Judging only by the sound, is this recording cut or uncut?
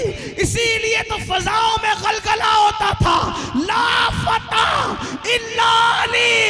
uncut